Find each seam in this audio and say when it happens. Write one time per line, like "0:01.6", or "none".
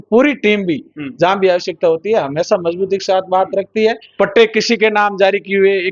0:04.0